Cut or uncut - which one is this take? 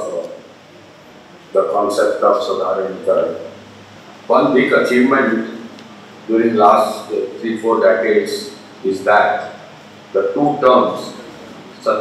uncut